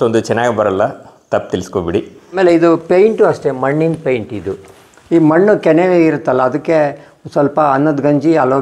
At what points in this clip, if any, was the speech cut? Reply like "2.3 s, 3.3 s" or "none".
2.2 s